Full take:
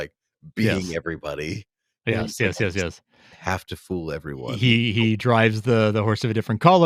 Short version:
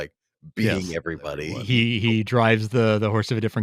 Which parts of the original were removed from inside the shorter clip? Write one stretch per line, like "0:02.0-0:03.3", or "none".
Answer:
0:01.6-0:04.5